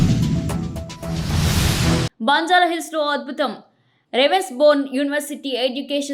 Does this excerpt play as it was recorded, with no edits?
no; 1 cut; at 2.1 s

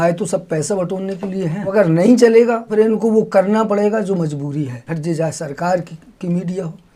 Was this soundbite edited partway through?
yes; 3 cuts; at 1.7 s, 2.7 s, 4.8 s

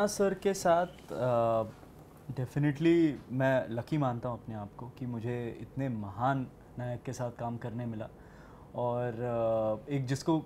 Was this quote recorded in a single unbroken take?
yes; 0 cuts

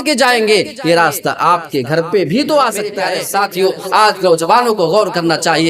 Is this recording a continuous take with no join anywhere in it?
no; 1 cut; at 3.0 s

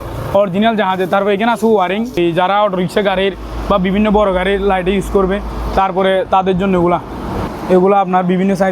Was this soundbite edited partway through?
yes; 2 cuts; at 2.2 s, 7.5 s

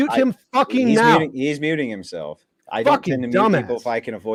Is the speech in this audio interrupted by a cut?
no; 0 cuts

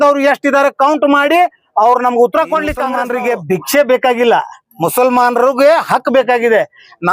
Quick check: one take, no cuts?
no; 1 cut; at 3.0 s

